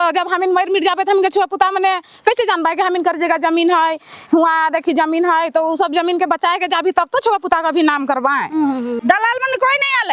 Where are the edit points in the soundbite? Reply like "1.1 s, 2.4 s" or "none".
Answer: 9.0 s